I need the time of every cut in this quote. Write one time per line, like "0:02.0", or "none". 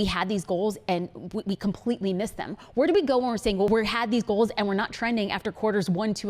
0:03.7